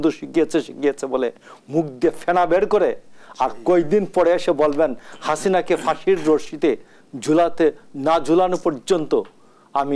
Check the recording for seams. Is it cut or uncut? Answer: uncut